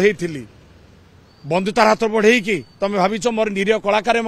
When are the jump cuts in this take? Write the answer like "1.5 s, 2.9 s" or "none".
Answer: none